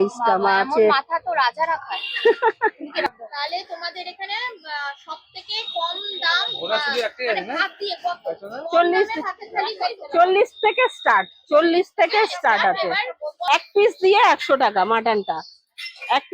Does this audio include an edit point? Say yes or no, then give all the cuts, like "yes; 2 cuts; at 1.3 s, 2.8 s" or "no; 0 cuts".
yes; 2 cuts; at 3.1 s, 13.3 s